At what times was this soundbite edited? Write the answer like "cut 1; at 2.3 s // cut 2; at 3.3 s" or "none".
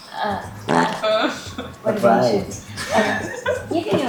none